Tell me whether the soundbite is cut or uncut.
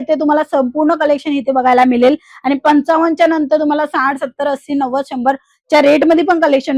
uncut